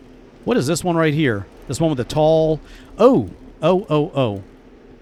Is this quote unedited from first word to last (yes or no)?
yes